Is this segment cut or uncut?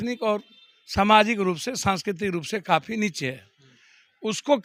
uncut